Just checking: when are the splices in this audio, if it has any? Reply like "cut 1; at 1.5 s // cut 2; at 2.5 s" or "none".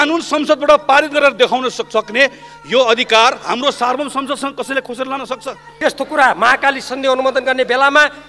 cut 1; at 5.6 s